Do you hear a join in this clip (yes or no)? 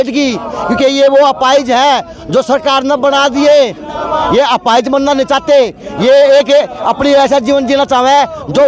no